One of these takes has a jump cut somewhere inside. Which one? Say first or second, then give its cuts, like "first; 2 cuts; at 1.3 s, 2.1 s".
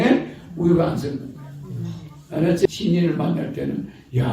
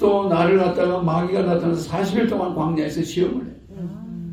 first; 1 cut; at 2.7 s